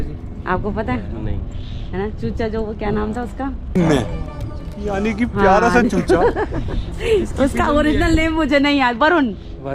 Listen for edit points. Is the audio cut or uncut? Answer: uncut